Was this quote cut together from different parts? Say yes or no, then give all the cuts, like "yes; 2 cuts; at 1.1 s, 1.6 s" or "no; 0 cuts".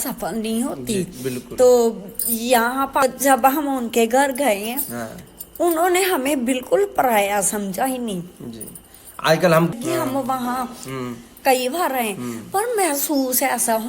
yes; 2 cuts; at 3.0 s, 9.7 s